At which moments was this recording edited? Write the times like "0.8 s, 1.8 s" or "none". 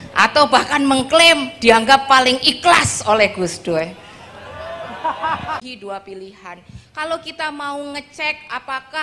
5.6 s